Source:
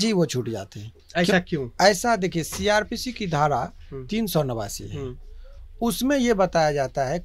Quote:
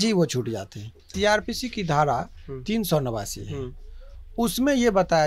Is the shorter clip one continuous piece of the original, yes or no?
no